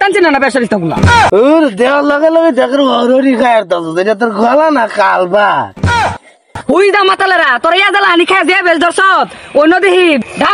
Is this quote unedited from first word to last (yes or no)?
no